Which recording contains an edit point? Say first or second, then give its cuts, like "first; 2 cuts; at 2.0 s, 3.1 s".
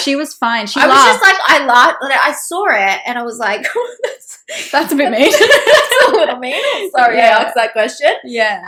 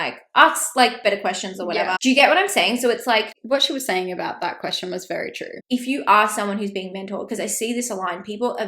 second; 3 cuts; at 2.0 s, 3.4 s, 5.5 s